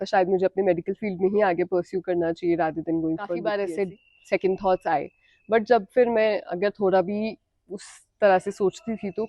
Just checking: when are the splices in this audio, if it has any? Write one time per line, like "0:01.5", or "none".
0:03.4